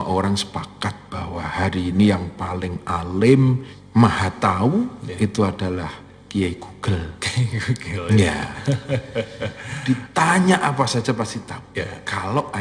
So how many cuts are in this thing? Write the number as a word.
one